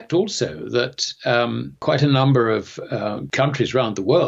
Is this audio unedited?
no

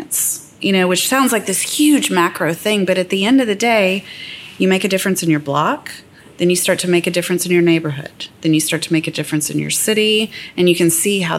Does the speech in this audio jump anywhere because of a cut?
no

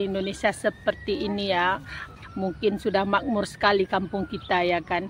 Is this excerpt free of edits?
no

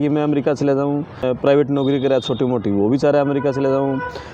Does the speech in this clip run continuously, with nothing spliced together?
no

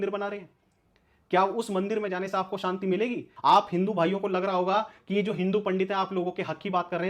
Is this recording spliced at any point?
yes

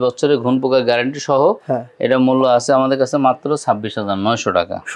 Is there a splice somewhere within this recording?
no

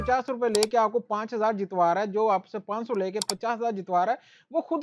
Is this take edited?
no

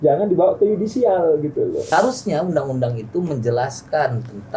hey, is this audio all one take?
no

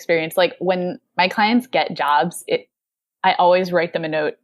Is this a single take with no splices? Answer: yes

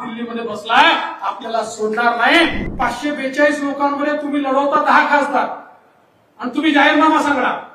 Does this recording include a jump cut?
yes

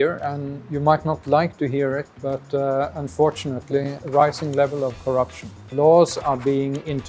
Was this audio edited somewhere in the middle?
no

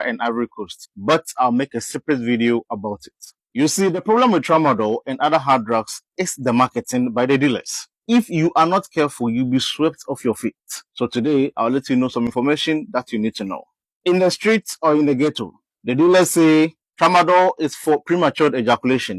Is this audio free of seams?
yes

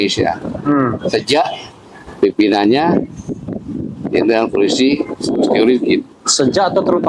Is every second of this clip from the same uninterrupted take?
yes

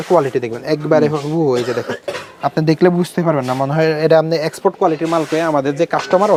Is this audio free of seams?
yes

